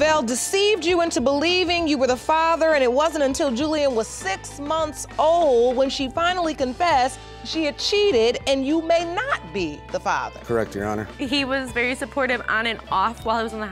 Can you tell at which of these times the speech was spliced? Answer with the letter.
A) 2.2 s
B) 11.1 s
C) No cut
B